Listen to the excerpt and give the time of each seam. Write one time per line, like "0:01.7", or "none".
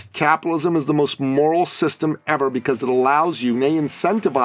none